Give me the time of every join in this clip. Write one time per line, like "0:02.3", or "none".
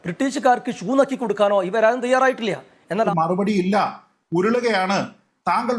0:03.1